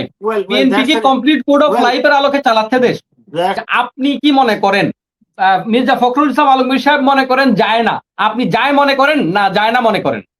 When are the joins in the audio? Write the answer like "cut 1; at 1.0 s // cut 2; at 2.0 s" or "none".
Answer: cut 1; at 3.6 s